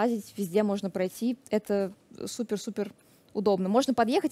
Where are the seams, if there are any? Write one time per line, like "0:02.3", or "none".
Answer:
none